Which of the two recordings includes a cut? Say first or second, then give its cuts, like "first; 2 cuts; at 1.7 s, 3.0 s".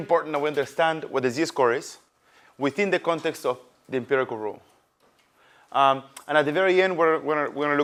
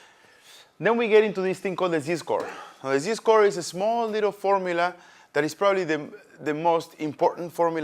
second; 1 cut; at 2.0 s